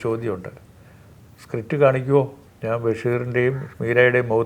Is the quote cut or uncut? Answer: cut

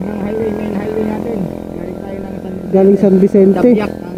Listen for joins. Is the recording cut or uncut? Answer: uncut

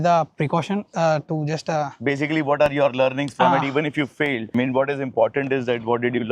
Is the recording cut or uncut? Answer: uncut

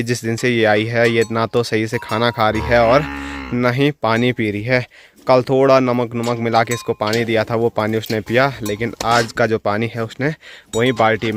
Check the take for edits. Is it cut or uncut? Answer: uncut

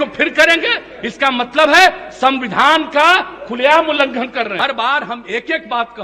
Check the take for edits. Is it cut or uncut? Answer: cut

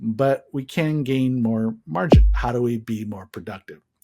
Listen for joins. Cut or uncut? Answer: cut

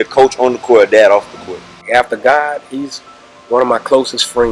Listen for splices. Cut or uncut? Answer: cut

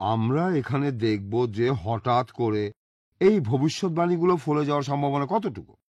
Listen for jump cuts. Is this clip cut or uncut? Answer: uncut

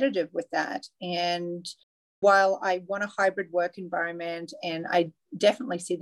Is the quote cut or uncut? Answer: uncut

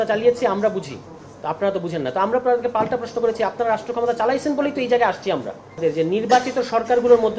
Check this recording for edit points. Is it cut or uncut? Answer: cut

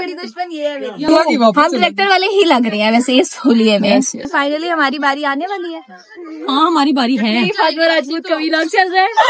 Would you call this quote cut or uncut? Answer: cut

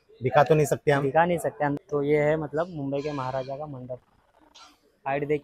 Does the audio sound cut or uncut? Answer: cut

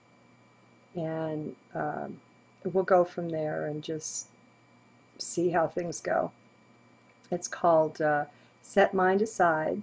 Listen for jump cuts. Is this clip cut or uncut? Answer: cut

